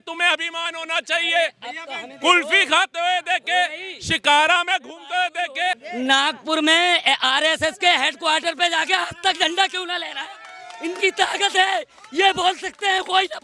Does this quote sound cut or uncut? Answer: cut